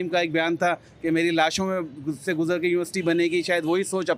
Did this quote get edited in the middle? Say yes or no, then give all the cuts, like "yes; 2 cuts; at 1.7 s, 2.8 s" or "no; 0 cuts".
no; 0 cuts